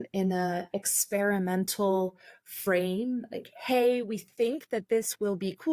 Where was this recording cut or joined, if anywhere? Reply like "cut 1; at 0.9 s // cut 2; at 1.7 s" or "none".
none